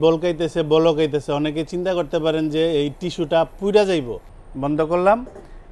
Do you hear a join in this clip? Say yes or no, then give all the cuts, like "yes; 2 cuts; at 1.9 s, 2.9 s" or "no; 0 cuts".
yes; 1 cut; at 4.2 s